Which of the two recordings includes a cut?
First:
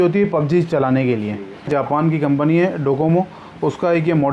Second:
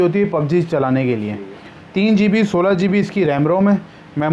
first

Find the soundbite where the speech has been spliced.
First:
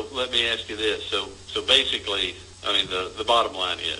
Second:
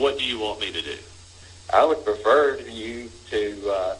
second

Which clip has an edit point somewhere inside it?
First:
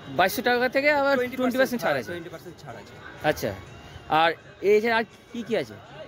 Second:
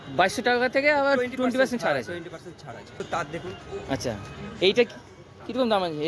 second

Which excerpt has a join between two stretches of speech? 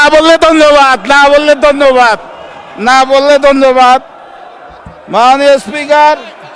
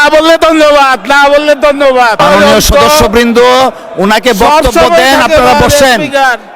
second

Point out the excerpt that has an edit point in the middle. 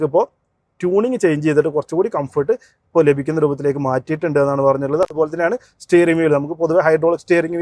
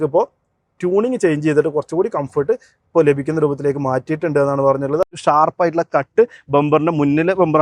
second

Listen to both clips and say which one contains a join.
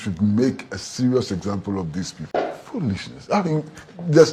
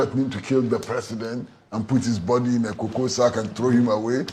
first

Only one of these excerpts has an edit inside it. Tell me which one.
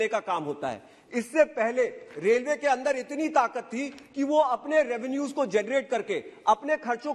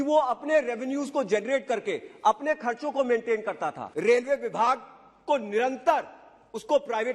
second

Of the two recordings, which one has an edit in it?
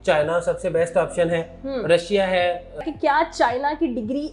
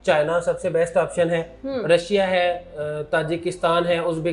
first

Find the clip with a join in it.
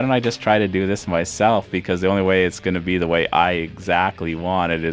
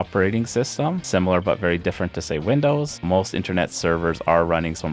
second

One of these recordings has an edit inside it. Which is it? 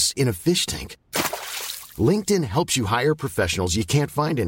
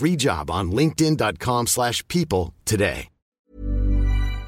second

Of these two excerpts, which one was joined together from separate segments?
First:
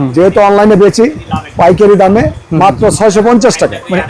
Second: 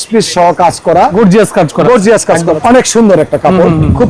second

